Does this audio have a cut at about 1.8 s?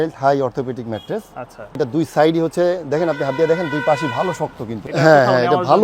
yes; 2 cuts; at 1.8 s, 4.8 s

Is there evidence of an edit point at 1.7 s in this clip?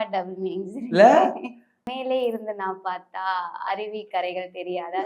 yes; 1 cut; at 1.7 s

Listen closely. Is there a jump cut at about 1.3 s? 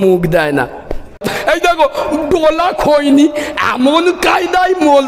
yes; 1 cut; at 1.3 s

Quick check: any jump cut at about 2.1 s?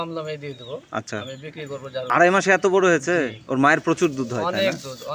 yes; 1 cut; at 2.1 s

